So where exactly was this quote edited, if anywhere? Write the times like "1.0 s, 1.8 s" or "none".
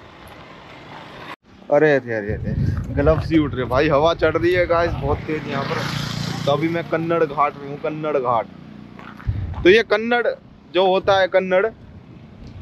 1.4 s